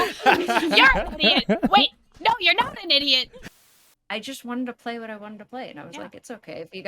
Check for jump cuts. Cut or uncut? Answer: cut